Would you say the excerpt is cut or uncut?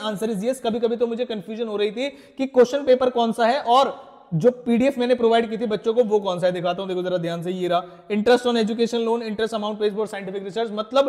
uncut